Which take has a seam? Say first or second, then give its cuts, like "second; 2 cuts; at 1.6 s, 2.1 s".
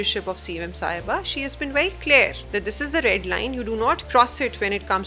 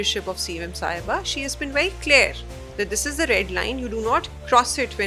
first; 2 cuts; at 2.4 s, 4.0 s